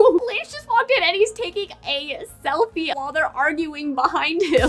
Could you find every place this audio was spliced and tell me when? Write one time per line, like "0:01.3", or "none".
0:03.0